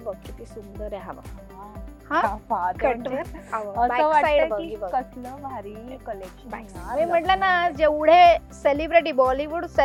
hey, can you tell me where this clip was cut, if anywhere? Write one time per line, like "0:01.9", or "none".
none